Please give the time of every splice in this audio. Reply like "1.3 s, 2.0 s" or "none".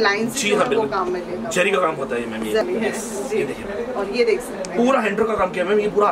2.6 s